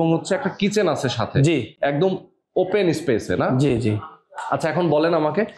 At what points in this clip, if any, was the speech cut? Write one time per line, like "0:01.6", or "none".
none

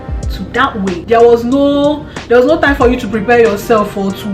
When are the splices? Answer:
0:01.0

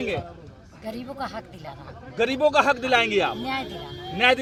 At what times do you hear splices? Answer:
none

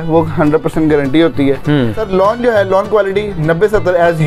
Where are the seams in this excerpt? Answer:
0:02.0

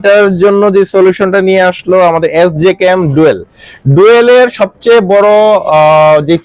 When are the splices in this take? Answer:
none

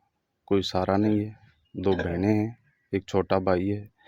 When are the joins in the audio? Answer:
none

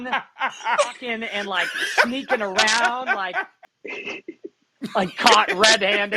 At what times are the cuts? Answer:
0:03.6

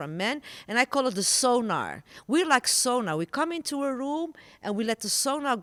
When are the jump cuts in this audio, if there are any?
none

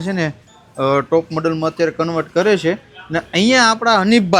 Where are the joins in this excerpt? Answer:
none

